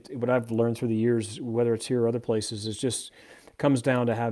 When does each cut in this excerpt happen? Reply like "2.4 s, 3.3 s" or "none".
none